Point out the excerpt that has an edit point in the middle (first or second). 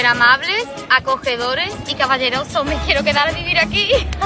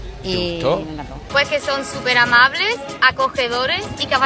second